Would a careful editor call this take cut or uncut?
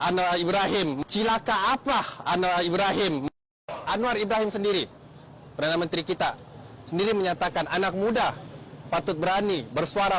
cut